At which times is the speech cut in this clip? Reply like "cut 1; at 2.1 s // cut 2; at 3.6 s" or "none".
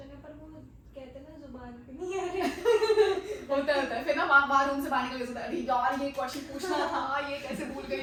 none

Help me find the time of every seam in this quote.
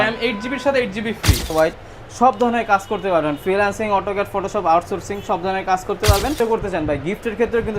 cut 1; at 1.5 s // cut 2; at 6.4 s

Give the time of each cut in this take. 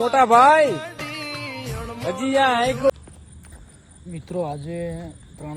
cut 1; at 2.9 s

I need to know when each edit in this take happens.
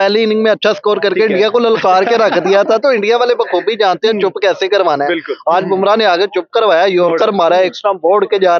none

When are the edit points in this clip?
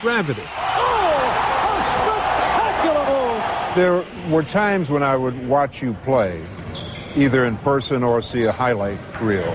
cut 1; at 2.8 s

